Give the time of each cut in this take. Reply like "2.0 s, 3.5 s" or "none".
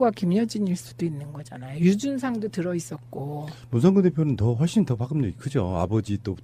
none